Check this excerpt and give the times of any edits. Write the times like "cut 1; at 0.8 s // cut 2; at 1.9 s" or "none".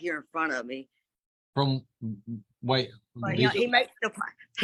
none

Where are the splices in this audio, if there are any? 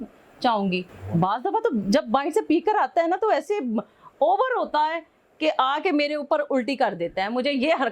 cut 1; at 1.0 s

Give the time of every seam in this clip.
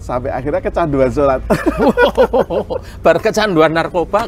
none

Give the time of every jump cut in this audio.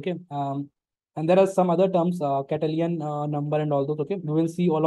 none

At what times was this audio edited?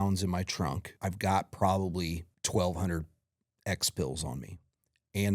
cut 1; at 0.9 s // cut 2; at 2.3 s

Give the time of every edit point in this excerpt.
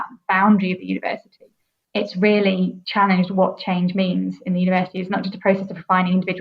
cut 1; at 1.9 s // cut 2; at 2.8 s

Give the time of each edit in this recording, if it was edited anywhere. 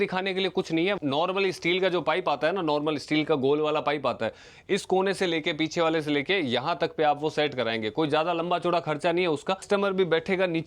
cut 1; at 1.0 s // cut 2; at 9.6 s

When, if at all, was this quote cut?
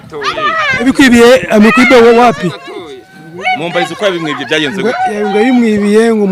none

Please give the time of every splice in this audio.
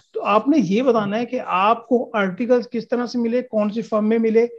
none

